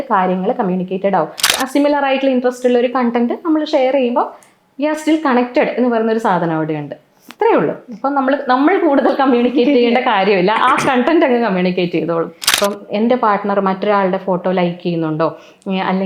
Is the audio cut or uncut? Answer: cut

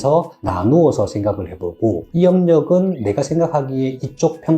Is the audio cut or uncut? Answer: cut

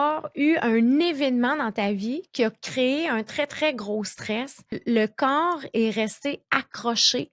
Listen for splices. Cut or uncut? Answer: cut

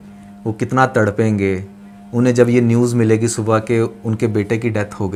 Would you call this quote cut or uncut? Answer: uncut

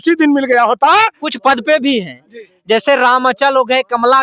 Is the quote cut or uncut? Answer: cut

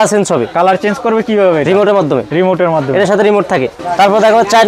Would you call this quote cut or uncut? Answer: cut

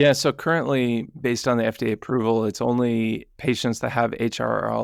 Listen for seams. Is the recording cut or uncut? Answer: uncut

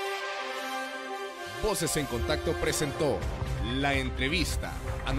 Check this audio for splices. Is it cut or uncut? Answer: uncut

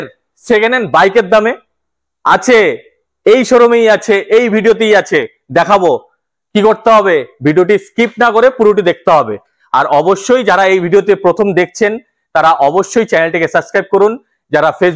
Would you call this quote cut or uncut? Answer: uncut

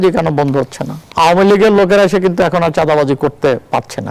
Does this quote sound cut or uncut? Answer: cut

